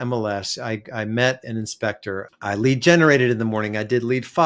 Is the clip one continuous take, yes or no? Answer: no